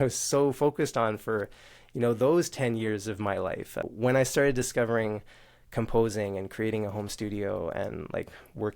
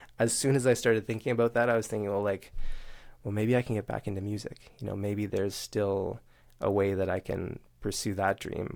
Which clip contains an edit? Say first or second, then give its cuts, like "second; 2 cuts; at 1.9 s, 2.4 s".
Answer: first; 1 cut; at 3.9 s